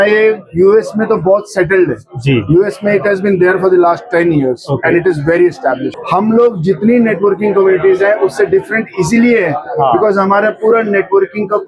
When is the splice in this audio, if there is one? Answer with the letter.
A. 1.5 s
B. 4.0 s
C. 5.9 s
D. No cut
C